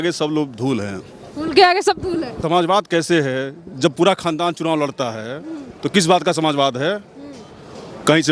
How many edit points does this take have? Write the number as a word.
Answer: one